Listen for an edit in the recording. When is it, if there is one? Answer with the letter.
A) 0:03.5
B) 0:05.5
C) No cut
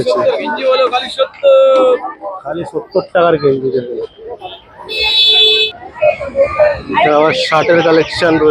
B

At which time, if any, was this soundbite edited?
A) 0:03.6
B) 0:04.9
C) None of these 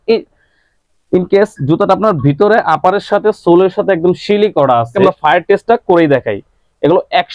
B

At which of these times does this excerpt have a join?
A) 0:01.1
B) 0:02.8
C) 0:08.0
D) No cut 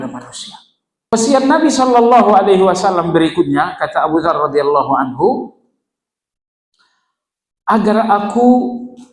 A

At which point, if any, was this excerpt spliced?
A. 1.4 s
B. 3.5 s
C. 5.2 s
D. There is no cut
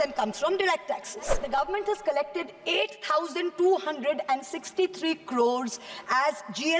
A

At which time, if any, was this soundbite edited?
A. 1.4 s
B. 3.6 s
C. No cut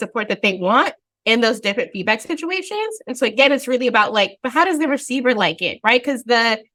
C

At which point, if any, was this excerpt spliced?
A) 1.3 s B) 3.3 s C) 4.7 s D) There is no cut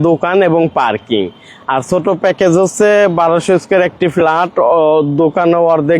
D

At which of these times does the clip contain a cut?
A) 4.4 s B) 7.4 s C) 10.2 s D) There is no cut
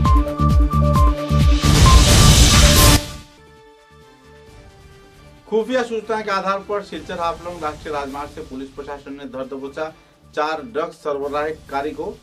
A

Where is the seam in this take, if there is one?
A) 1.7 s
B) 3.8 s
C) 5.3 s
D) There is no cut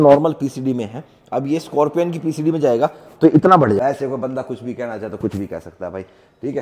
B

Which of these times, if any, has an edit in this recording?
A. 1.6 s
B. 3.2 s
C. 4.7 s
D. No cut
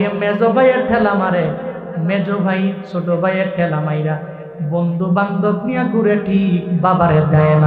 D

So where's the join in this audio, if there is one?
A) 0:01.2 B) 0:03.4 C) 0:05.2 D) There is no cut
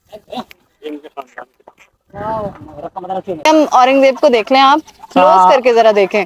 B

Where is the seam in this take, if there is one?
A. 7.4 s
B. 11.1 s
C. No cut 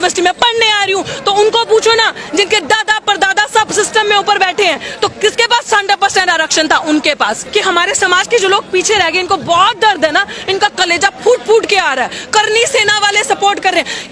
A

